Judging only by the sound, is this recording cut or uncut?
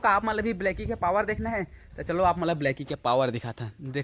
uncut